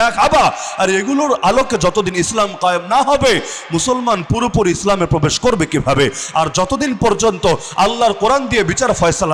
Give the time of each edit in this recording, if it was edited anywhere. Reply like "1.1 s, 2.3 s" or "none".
none